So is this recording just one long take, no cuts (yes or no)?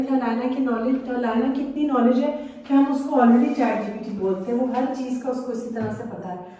yes